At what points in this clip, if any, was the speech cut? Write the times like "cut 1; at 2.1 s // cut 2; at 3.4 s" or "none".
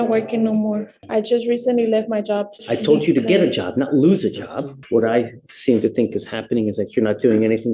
cut 1; at 0.9 s // cut 2; at 2.5 s // cut 3; at 4.8 s